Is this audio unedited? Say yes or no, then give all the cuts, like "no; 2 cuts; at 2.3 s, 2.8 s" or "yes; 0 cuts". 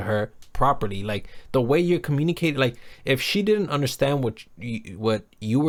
yes; 0 cuts